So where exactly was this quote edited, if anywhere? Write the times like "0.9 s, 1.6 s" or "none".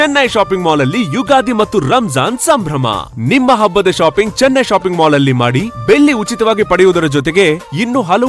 none